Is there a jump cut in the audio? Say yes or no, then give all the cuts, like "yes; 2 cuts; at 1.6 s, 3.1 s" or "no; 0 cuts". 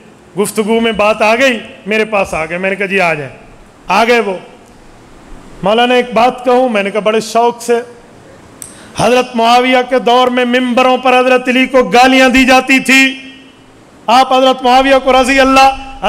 no; 0 cuts